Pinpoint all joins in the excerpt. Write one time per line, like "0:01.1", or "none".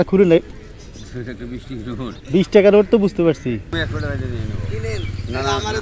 0:03.7